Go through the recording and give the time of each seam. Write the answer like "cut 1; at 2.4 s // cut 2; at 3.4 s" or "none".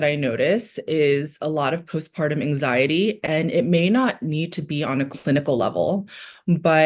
none